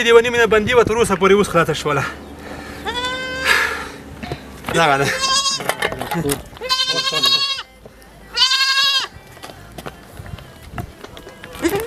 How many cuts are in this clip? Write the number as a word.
zero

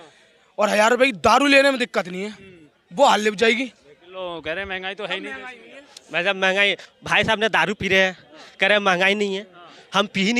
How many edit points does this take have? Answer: zero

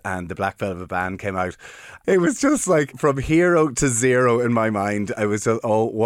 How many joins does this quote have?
two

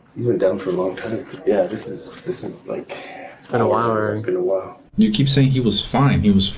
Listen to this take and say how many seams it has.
two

